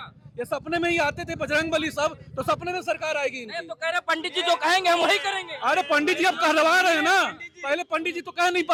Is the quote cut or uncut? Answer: uncut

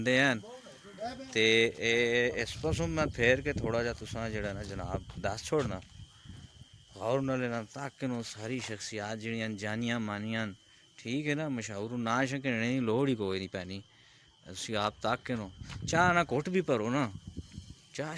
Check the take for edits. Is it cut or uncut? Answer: uncut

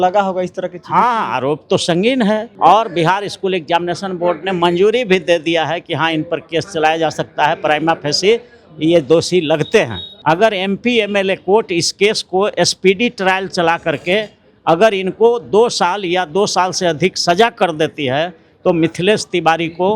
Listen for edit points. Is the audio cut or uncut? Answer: cut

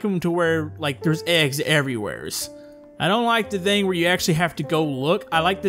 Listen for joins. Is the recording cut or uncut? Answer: uncut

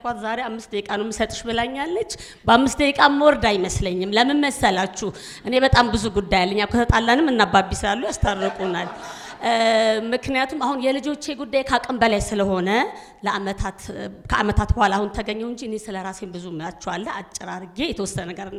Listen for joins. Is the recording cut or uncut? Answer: uncut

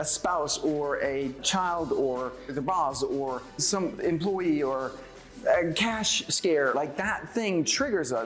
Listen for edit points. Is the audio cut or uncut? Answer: cut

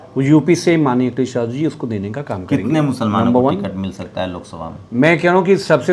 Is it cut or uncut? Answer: uncut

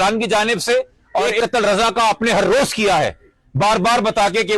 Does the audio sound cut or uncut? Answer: cut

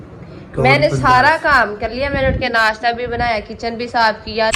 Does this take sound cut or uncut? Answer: uncut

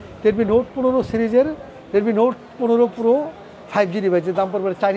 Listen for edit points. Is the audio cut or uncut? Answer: uncut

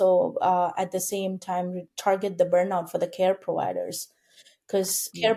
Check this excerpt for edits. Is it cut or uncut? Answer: uncut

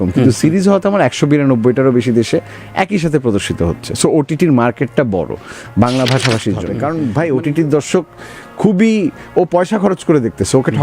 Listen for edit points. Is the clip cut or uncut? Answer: cut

